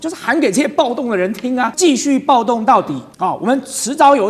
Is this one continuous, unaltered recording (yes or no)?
no